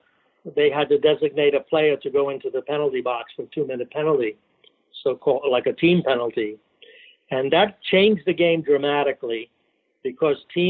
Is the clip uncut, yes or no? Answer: yes